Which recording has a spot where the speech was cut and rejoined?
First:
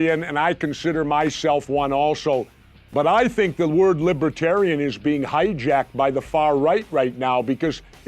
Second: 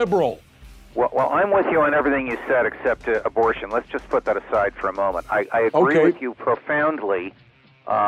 first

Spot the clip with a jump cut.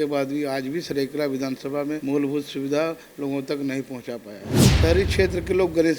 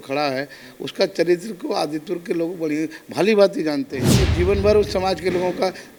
first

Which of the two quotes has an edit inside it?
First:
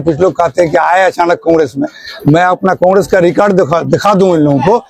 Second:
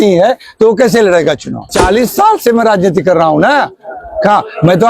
second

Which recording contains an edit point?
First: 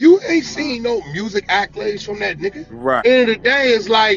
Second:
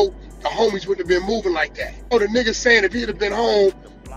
second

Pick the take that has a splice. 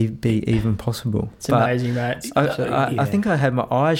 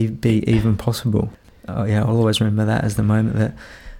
second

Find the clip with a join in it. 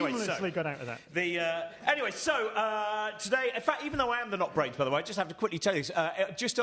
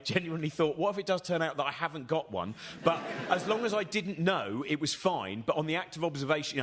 first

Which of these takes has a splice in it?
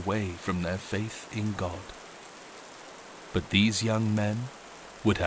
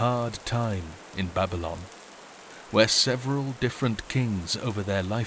first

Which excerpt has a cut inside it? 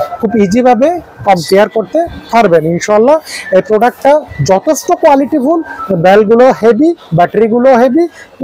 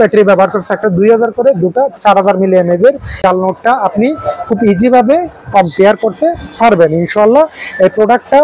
second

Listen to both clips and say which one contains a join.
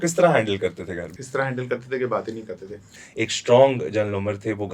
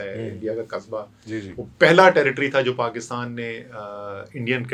first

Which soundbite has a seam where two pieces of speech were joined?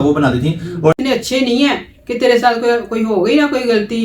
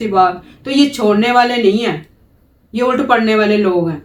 first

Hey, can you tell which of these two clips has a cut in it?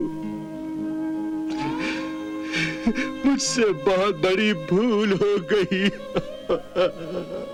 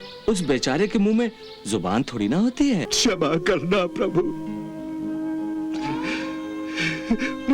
second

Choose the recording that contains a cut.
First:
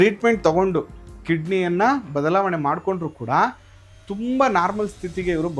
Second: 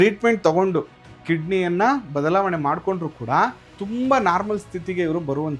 second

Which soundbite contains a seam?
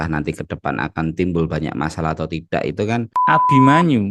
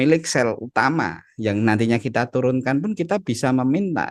first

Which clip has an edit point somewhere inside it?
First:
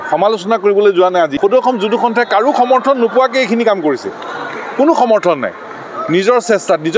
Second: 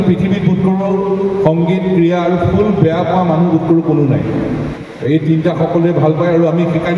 first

